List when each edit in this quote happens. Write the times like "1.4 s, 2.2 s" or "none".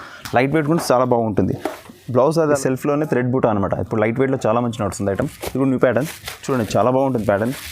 2.6 s